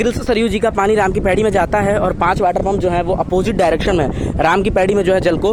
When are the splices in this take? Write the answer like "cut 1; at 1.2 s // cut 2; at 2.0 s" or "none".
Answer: none